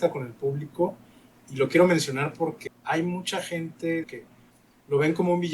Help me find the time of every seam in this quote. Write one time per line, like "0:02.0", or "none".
0:02.6
0:04.1